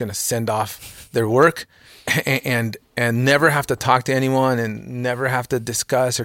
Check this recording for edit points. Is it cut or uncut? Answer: uncut